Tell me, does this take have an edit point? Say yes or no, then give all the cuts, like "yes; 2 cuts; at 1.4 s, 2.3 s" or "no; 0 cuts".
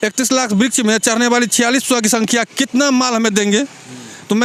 no; 0 cuts